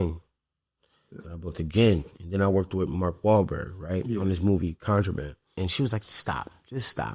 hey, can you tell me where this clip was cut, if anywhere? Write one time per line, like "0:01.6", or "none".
0:05.5